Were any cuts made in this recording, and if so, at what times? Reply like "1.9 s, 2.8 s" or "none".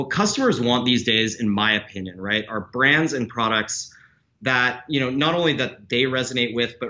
none